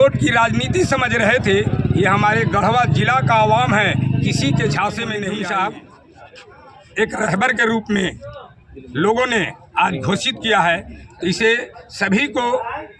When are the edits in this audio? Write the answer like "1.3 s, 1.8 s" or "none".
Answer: 5.2 s